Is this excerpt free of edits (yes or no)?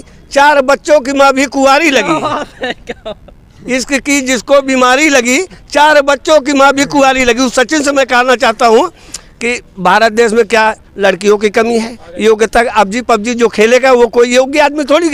yes